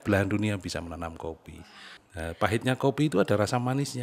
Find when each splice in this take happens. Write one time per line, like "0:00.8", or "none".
0:01.7